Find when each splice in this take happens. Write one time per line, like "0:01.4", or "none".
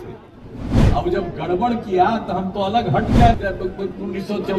0:03.4